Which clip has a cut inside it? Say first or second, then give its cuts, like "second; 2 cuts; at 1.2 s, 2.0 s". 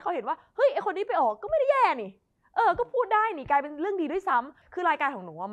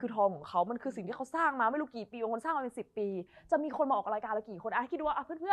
first; 1 cut; at 4.6 s